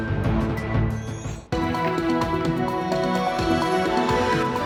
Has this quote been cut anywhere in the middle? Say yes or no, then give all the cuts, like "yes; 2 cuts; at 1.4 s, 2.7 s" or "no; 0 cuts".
no; 0 cuts